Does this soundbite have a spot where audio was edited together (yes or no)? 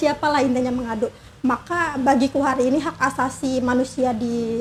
no